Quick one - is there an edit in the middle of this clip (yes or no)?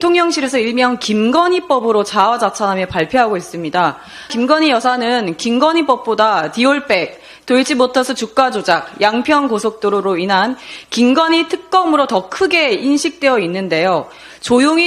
yes